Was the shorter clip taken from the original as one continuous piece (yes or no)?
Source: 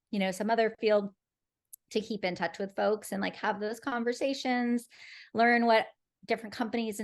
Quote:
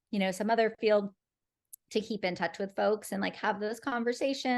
yes